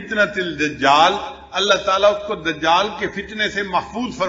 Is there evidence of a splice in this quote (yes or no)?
no